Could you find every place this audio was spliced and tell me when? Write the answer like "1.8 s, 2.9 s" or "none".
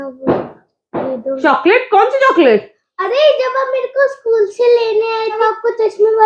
1.4 s, 5.4 s